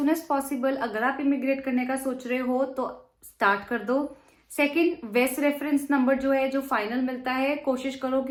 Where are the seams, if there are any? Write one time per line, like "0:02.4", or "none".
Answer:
none